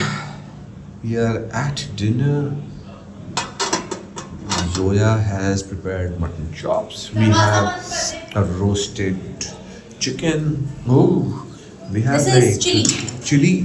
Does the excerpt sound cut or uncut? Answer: uncut